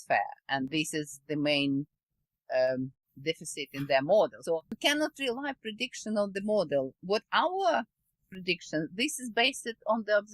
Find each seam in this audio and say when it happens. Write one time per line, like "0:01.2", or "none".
0:04.4